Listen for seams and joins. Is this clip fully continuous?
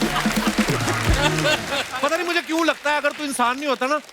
no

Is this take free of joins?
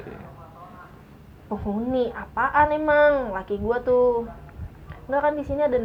yes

